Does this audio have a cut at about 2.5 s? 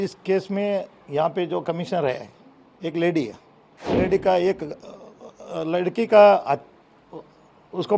no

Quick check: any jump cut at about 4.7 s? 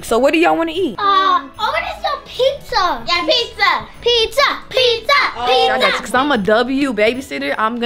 no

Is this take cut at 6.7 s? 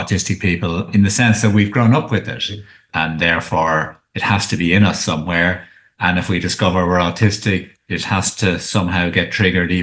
no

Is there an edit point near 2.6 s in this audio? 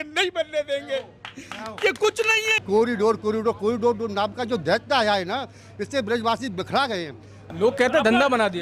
yes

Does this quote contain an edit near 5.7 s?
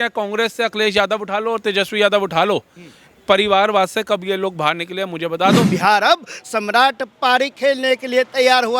yes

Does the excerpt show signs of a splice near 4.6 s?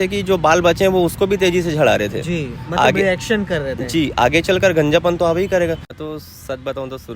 no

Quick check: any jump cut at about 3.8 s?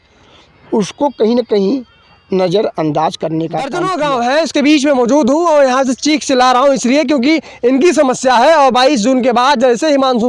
yes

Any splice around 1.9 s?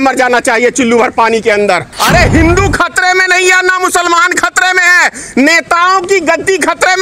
yes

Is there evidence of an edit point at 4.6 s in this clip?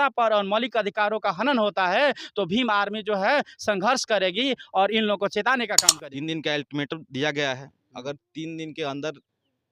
no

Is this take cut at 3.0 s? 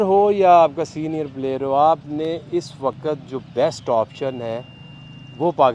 no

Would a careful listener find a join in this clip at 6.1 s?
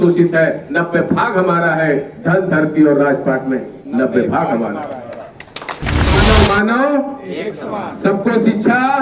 yes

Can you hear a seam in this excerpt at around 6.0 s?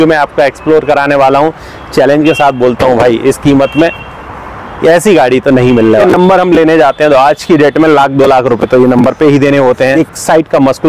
yes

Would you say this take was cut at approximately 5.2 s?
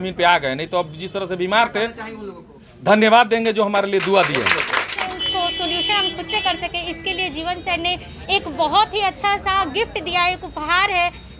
yes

